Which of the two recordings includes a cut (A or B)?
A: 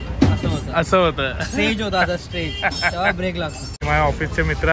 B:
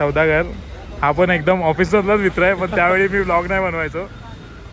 A